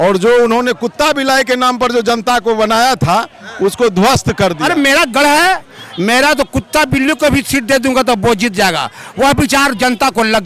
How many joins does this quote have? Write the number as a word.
one